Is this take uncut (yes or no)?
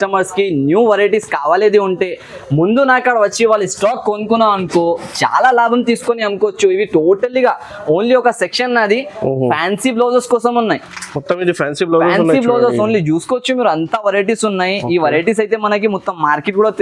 yes